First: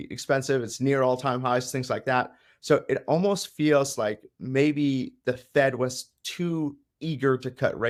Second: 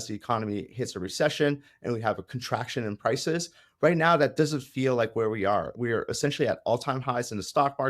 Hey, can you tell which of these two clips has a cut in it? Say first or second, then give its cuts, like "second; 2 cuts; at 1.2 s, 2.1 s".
second; 1 cut; at 5.7 s